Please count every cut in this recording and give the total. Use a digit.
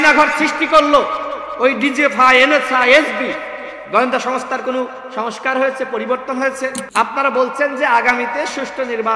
1